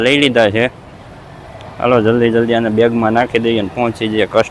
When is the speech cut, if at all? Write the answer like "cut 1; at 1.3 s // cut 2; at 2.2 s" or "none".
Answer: none